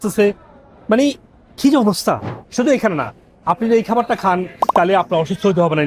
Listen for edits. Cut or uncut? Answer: cut